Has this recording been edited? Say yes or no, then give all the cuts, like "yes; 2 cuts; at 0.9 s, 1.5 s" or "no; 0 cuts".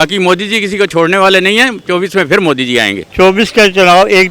yes; 1 cut; at 3.0 s